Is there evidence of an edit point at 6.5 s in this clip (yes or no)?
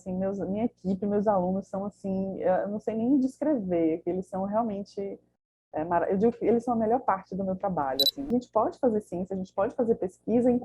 no